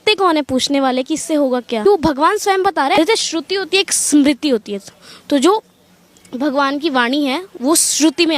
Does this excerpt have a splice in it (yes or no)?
yes